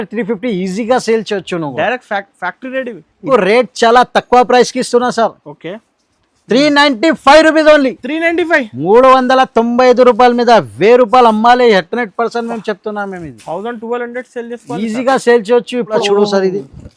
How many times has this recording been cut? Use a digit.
2